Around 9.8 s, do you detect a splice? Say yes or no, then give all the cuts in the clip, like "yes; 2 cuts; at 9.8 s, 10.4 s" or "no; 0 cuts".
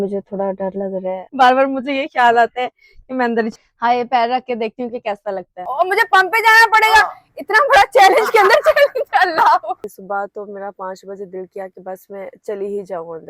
yes; 4 cuts; at 1.3 s, 3.5 s, 5.5 s, 9.8 s